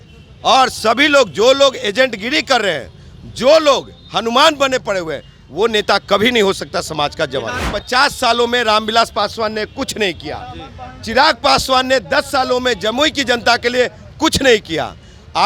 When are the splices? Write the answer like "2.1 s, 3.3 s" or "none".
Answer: 7.7 s